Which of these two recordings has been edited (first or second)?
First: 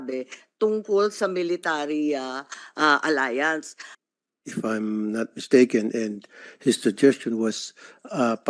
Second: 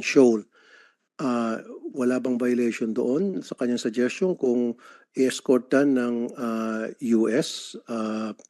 first